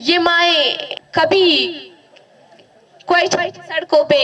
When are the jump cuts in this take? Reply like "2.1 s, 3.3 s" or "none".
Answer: 0.9 s